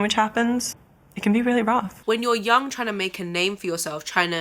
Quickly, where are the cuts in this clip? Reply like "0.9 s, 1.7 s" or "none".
1.9 s